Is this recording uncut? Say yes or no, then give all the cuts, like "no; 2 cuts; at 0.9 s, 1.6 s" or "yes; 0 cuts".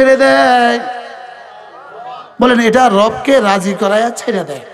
yes; 0 cuts